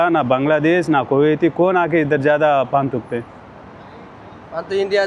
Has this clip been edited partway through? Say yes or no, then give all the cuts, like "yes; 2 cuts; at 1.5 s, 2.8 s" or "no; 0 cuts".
no; 0 cuts